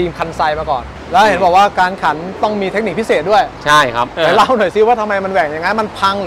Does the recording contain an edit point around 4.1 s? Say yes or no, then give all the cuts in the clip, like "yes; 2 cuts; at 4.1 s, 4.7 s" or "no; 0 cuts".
yes; 2 cuts; at 0.9 s, 4.1 s